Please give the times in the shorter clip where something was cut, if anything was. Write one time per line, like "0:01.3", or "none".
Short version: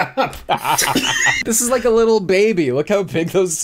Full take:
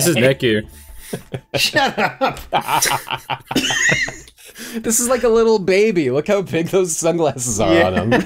0:01.4